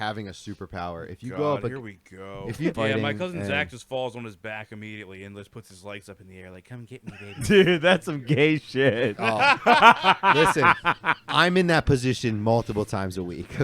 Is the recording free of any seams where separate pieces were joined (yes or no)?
no